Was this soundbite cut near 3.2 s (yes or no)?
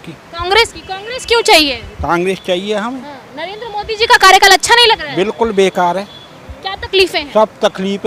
no